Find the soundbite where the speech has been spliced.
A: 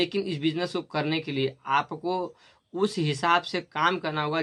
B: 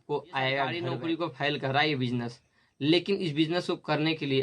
B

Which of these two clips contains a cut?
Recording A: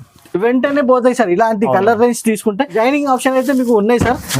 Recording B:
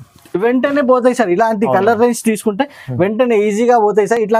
A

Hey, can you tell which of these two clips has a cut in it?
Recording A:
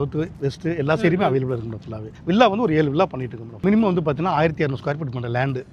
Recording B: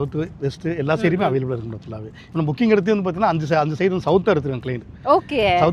A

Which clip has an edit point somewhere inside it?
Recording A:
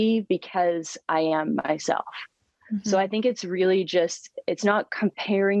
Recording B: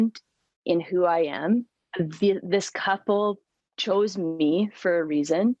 B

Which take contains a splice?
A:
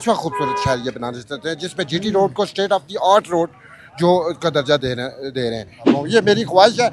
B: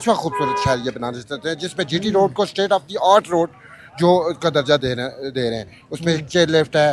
A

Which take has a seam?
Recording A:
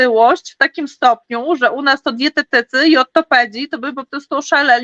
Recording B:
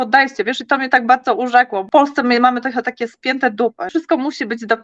B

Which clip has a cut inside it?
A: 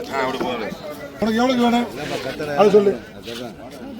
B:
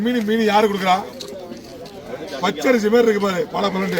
A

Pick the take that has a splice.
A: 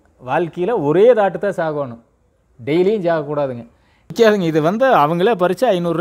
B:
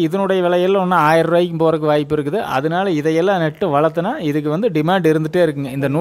A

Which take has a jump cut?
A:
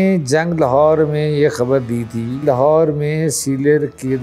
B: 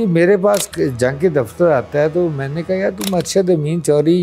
A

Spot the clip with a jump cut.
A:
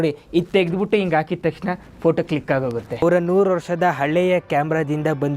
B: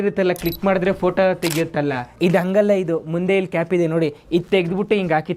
A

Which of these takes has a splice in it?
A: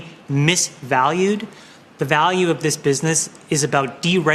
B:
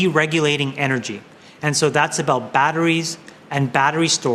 A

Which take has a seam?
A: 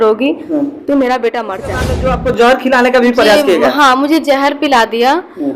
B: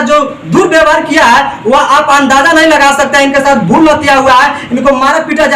A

